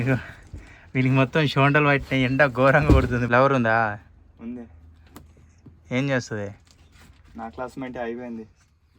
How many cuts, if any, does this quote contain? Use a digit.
1